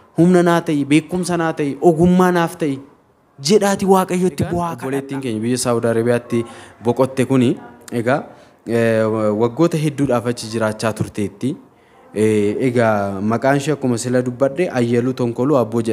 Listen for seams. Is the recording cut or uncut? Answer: cut